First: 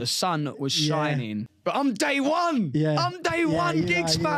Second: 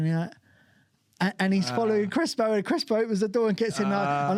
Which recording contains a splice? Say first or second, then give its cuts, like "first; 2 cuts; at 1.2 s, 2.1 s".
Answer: first; 1 cut; at 1.4 s